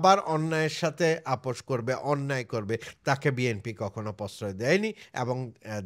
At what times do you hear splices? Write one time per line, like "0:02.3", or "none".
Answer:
none